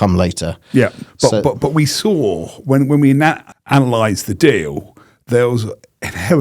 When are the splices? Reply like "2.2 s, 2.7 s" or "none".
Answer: 3.5 s